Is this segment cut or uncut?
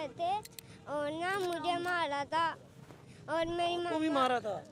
uncut